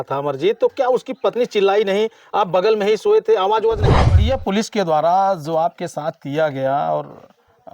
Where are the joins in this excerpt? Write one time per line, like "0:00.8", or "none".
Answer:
0:03.9